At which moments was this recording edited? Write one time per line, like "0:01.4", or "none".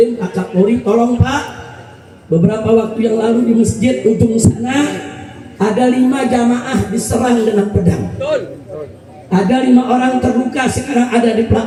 none